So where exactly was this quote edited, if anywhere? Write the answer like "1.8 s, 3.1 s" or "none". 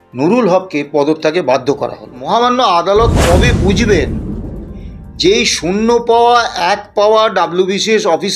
2.2 s